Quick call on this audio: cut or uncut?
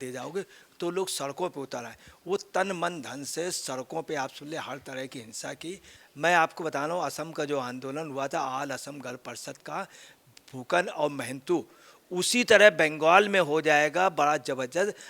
cut